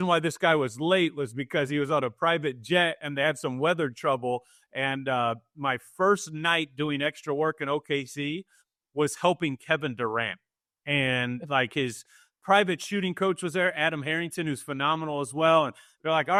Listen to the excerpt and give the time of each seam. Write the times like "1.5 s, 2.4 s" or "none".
none